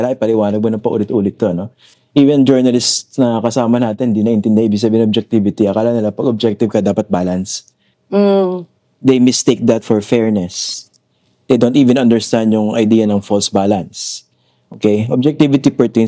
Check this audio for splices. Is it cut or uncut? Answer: uncut